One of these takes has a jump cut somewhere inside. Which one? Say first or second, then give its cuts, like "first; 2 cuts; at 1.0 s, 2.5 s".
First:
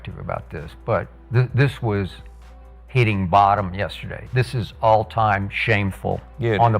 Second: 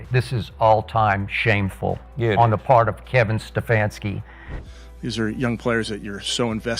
second; 1 cut; at 4.5 s